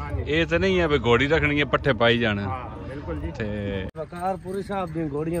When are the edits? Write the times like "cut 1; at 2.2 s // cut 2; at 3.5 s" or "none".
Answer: cut 1; at 3.9 s

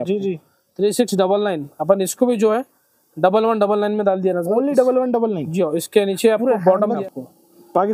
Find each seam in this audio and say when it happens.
cut 1; at 7.0 s

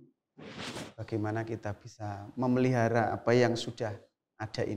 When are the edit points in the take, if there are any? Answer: none

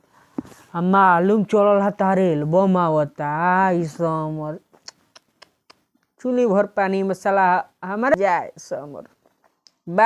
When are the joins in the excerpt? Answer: cut 1; at 8.1 s

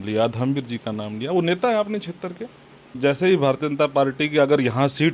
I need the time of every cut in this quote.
cut 1; at 3.0 s

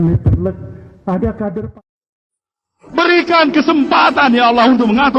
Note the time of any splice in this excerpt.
cut 1; at 1.7 s

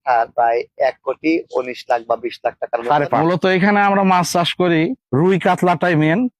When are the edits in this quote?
cut 1; at 3.2 s

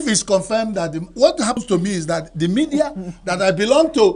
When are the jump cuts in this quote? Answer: cut 1; at 1.6 s

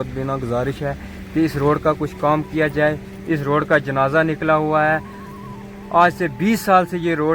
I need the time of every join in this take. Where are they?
none

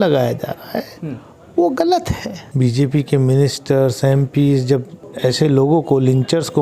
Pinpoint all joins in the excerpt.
cut 1; at 2.4 s // cut 2; at 5.0 s

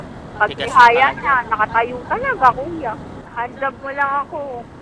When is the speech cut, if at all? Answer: cut 1; at 3.2 s

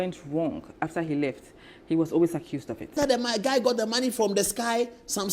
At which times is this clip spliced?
cut 1; at 3.0 s

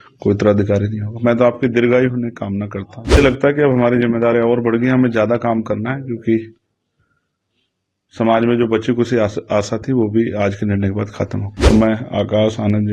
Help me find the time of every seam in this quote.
cut 1; at 3.2 s // cut 2; at 11.5 s

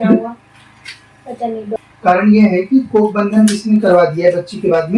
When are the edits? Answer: cut 1; at 1.8 s

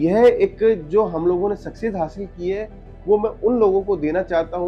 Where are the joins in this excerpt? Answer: none

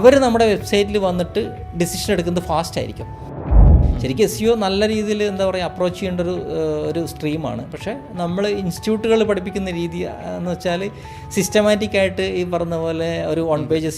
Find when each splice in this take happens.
cut 1; at 3.5 s

